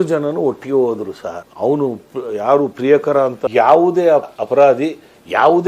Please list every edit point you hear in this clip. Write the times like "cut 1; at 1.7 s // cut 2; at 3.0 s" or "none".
cut 1; at 3.4 s